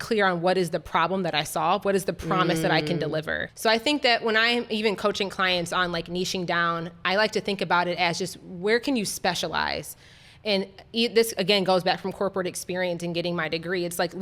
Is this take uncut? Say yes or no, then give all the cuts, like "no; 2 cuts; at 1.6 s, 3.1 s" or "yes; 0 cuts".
yes; 0 cuts